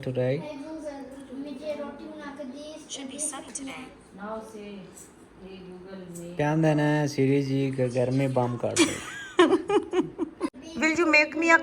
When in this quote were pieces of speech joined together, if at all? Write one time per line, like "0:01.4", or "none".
0:10.6